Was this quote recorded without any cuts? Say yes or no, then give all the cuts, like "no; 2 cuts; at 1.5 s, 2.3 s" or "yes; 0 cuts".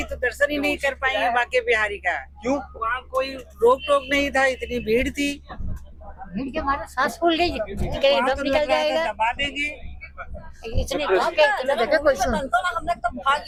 yes; 0 cuts